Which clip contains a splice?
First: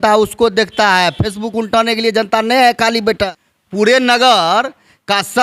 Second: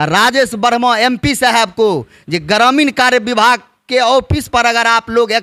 first; 1 cut; at 3.2 s

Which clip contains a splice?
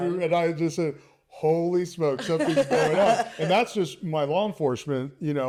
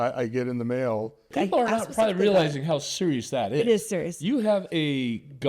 second; 1 cut; at 1.3 s

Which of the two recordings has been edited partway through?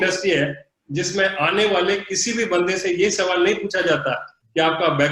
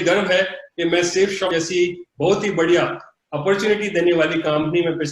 second; 1 cut; at 1.5 s

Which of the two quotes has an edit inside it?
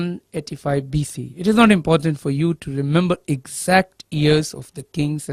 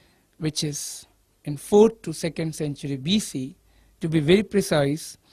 first; 1 cut; at 2.6 s

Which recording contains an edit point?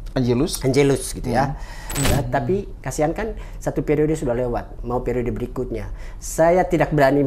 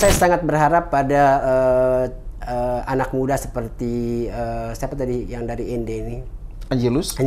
first; 1 cut; at 2.0 s

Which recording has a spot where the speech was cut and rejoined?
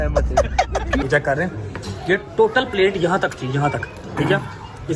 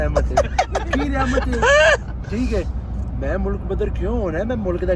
first; 1 cut; at 1.0 s

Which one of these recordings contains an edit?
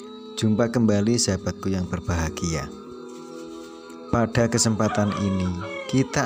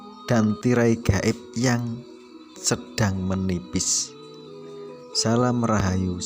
second; 2 cuts; at 3.9 s, 5.2 s

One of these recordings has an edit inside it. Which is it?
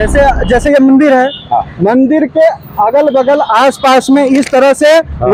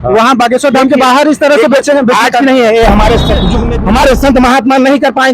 second; 1 cut; at 3.6 s

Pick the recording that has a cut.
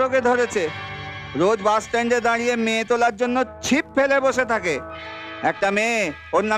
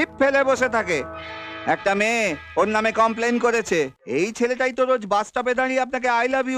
second; 1 cut; at 4.0 s

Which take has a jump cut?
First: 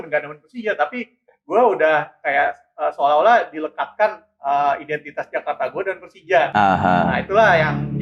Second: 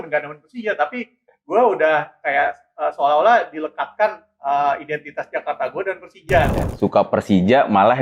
second; 1 cut; at 6.5 s

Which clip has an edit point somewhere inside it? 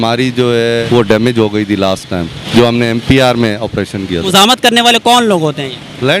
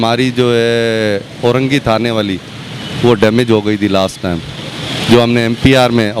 first; 3 cuts; at 0.8 s, 2.4 s, 4.3 s

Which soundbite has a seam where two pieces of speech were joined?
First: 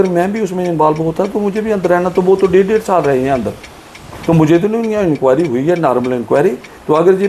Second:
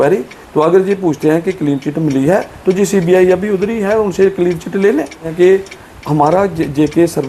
second; 1 cut; at 5.3 s

